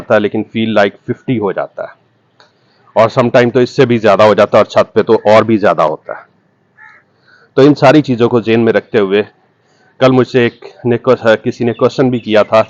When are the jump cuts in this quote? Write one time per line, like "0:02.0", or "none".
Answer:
none